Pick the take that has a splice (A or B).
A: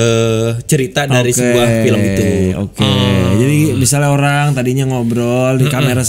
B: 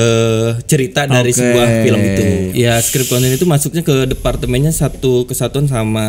B